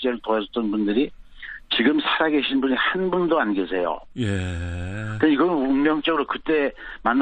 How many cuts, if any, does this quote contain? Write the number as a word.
one